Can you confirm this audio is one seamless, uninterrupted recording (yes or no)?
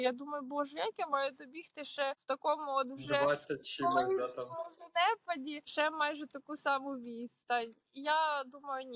no